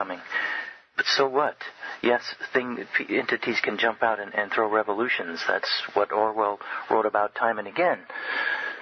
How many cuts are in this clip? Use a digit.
1